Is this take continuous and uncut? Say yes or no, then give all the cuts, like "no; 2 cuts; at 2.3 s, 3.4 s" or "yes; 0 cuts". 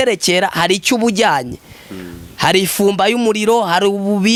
yes; 0 cuts